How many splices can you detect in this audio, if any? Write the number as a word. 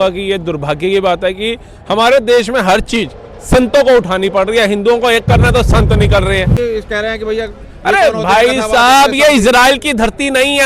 one